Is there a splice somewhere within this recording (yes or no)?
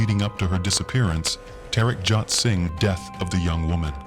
yes